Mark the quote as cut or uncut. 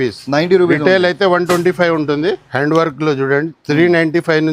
cut